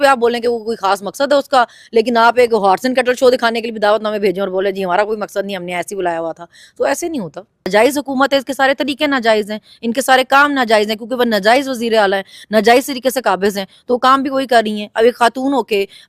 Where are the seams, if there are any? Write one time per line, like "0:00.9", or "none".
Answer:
0:07.7